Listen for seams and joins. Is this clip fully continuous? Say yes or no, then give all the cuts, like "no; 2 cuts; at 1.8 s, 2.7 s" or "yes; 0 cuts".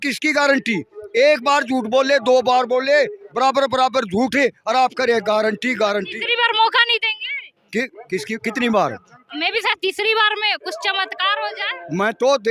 yes; 0 cuts